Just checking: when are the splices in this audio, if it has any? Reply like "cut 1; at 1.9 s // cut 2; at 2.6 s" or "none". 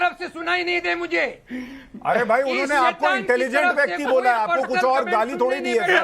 none